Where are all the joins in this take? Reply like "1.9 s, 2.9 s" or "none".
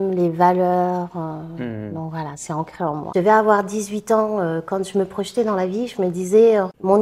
3.1 s